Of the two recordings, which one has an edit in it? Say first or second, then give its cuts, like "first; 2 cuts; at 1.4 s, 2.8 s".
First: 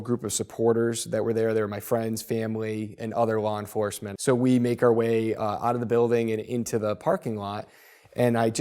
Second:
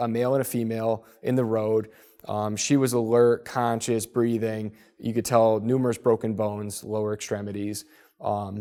first; 1 cut; at 4.0 s